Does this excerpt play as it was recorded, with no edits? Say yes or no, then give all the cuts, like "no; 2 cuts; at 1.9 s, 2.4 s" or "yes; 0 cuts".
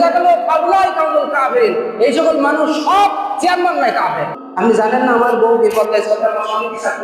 no; 1 cut; at 4.4 s